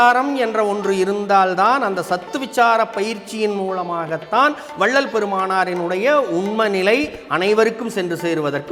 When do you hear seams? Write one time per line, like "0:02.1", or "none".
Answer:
none

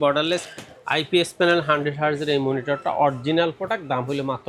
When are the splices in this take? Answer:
none

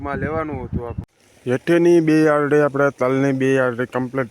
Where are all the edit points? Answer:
0:01.0

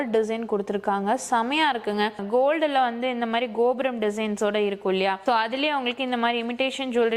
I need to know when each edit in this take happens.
0:02.1
0:05.2

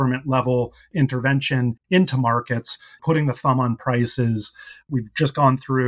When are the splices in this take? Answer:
0:01.8

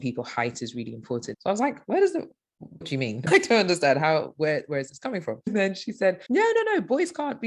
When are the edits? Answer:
0:01.3

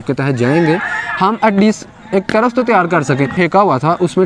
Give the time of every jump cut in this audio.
0:03.4

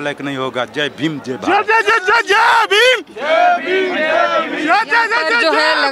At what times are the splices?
none

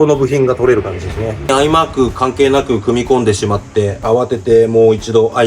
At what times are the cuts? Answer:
0:01.5
0:04.0

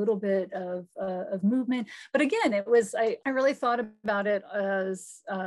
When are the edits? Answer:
0:03.2

